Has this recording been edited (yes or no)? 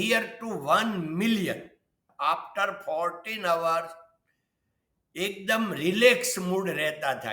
yes